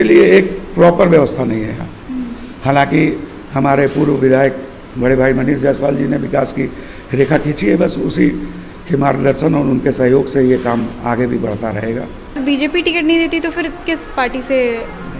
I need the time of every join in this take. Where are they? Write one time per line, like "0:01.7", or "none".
0:12.4